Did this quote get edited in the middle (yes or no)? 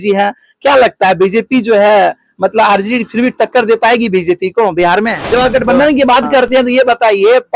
yes